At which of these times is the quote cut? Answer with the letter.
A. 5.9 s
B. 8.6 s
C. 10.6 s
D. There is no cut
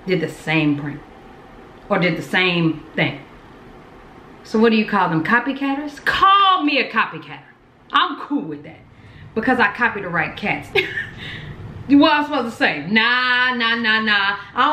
C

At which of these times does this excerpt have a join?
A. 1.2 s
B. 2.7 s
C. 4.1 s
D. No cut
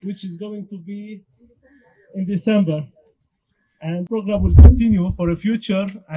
C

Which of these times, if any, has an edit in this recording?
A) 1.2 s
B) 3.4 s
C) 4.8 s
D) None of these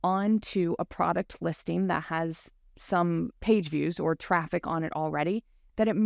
B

